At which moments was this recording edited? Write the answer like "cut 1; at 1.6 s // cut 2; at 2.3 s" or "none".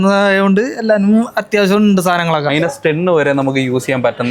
cut 1; at 2.5 s